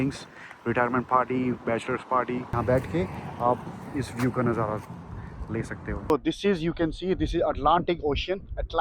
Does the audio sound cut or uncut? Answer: cut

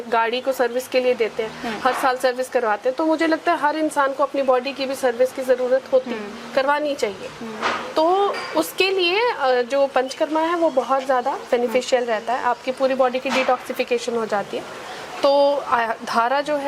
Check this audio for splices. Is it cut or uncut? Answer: uncut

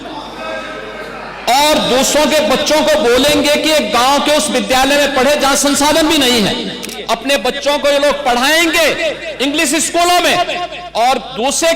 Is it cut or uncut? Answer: cut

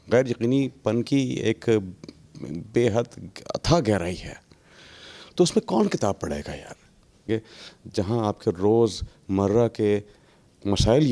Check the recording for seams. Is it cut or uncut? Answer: cut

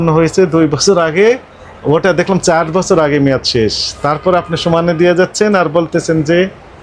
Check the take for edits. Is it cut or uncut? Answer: uncut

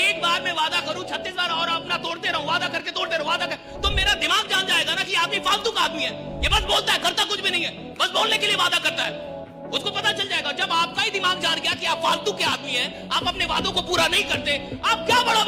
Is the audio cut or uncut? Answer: uncut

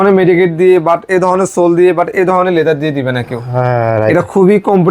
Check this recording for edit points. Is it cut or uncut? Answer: uncut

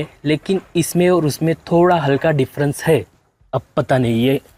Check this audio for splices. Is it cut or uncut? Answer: uncut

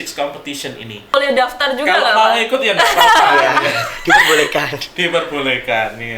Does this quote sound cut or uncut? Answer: cut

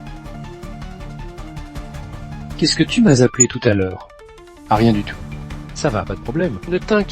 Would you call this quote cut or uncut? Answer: cut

